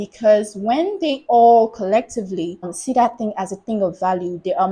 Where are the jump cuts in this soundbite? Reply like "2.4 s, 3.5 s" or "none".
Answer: 2.7 s